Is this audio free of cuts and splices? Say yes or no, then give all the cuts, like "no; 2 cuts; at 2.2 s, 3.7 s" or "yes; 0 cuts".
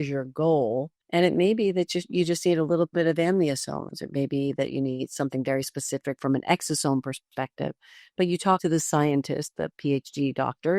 no; 2 cuts; at 0.9 s, 8.6 s